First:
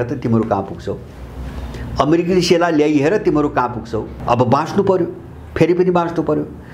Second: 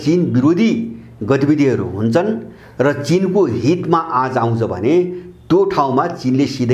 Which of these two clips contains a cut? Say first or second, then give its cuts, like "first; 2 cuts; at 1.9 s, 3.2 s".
first; 1 cut; at 4.1 s